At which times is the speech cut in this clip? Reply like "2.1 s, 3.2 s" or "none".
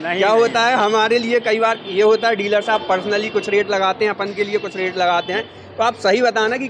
none